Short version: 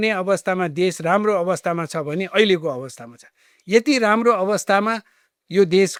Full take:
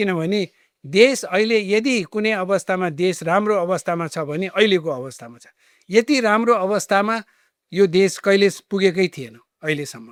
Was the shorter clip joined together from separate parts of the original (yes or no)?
no